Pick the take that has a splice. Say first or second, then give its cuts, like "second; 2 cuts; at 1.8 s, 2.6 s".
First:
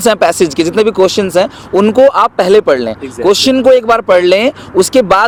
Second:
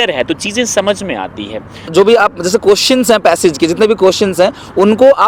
second; 1 cut; at 1.9 s